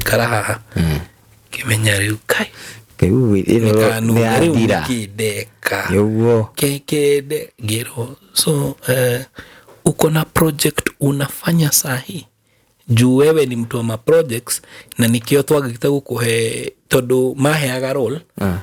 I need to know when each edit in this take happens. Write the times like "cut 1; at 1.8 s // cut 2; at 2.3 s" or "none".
none